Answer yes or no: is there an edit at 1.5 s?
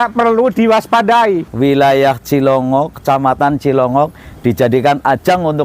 yes